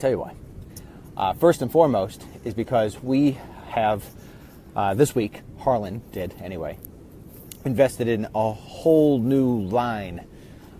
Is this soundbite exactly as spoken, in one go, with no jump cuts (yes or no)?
yes